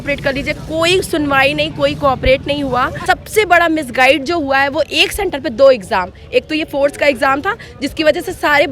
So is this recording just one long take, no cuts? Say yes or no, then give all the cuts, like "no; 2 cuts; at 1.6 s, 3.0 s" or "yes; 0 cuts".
no; 1 cut; at 2.9 s